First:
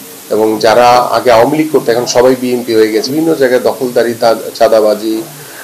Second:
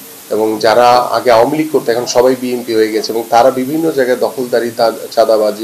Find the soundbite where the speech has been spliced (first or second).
first